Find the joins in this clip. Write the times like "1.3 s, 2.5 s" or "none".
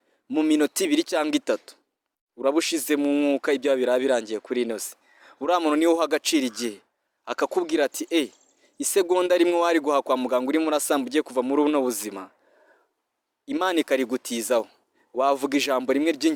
none